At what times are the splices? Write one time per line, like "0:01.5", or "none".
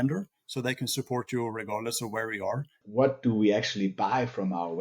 0:02.8